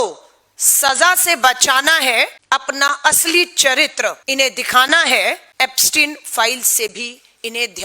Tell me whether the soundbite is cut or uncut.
cut